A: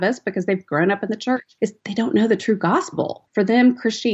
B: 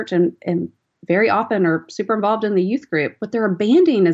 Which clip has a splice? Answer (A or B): A